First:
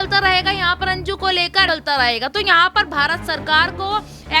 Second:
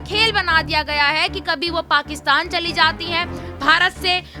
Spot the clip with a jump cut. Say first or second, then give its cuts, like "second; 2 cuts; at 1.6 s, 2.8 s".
first; 1 cut; at 1.7 s